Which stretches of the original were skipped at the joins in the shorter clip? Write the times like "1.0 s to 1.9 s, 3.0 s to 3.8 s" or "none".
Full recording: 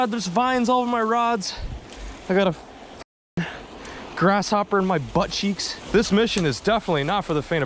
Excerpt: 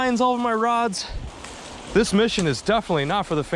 2.2 s to 5.7 s